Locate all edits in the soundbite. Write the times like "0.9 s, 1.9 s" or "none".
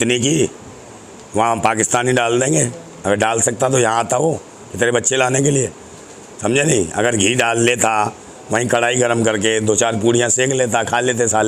none

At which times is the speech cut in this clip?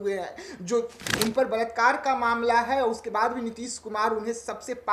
1.0 s

